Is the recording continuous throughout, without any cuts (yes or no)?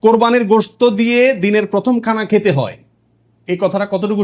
yes